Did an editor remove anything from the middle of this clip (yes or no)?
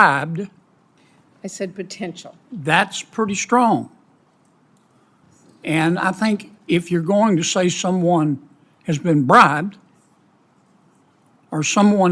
yes